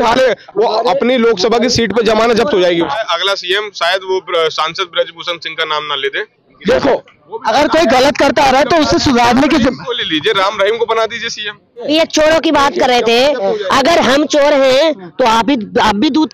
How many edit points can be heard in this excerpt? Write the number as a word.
three